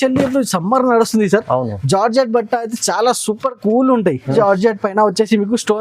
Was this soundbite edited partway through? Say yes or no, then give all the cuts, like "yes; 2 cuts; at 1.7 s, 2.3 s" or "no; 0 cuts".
yes; 1 cut; at 4.3 s